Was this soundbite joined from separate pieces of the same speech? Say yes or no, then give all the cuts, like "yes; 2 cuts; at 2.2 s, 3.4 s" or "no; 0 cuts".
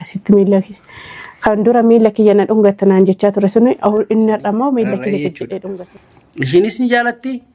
yes; 1 cut; at 6.0 s